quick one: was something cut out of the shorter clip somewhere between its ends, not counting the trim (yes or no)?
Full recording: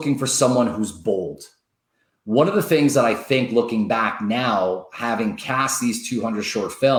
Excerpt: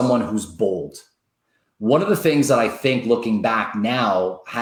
no